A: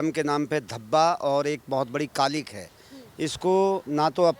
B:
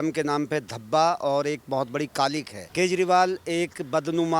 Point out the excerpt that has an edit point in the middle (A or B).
B